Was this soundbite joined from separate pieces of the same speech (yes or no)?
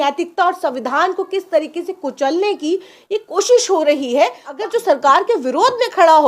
yes